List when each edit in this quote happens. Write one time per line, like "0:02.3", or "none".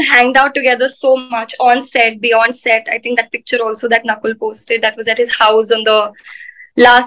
none